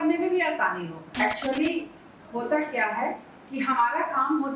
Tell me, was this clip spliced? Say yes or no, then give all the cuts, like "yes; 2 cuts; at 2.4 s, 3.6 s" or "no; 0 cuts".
yes; 1 cut; at 1.0 s